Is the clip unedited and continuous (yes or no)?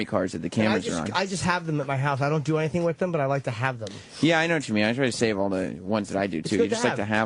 yes